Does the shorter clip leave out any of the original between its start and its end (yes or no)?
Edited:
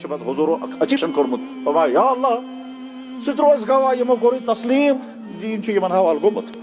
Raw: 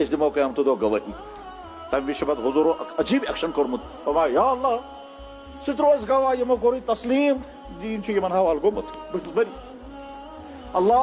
yes